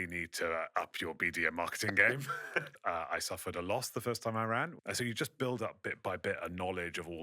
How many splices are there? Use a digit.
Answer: 2